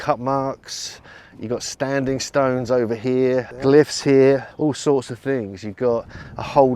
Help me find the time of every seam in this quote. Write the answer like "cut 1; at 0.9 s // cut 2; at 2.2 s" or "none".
cut 1; at 3.5 s // cut 2; at 4.5 s

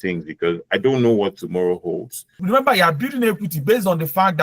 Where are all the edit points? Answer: cut 1; at 2.3 s

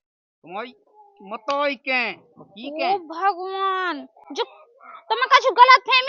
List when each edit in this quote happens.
none

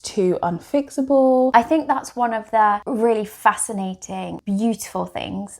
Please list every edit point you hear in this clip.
cut 1; at 1.5 s // cut 2; at 2.8 s // cut 3; at 4.3 s

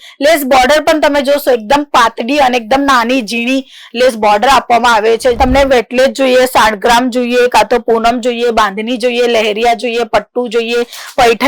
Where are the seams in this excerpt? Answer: cut 1; at 5.4 s

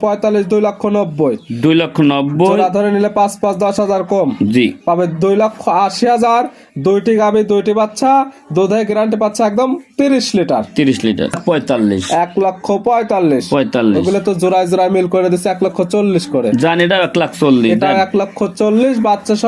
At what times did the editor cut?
cut 1; at 11.4 s

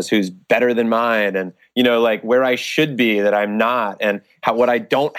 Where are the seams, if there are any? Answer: none

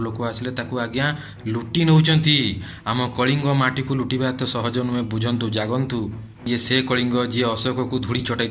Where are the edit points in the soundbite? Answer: cut 1; at 6.5 s

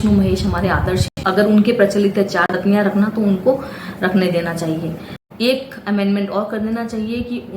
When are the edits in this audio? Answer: cut 1; at 1.3 s // cut 2; at 2.5 s // cut 3; at 5.1 s

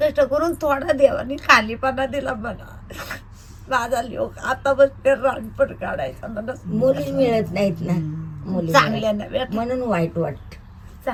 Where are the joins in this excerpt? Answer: none

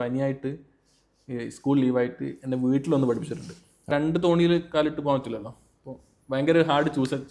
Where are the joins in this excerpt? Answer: cut 1; at 3.9 s

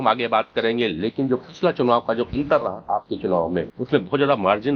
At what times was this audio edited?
cut 1; at 3.8 s

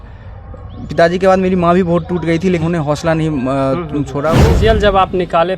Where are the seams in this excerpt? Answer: cut 1; at 2.6 s // cut 2; at 4.3 s

